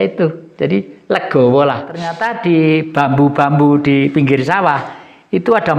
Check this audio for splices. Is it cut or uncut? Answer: cut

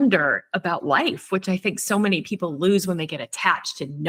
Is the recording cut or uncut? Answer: uncut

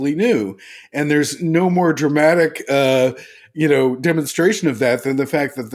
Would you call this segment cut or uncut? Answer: uncut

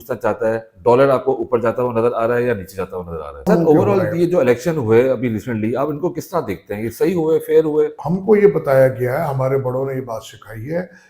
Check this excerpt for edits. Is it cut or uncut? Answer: cut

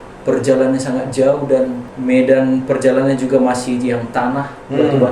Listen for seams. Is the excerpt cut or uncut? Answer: cut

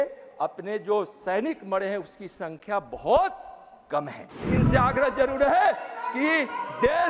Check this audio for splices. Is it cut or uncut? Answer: cut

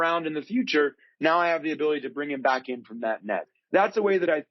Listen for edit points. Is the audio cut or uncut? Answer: cut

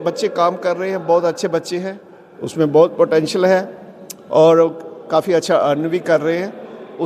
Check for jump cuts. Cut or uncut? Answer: uncut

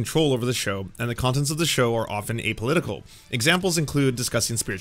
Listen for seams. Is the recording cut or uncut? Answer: uncut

